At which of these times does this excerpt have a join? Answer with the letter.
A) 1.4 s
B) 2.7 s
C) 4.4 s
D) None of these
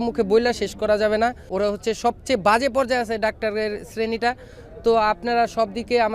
A